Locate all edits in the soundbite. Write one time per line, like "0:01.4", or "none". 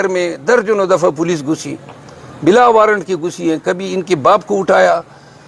none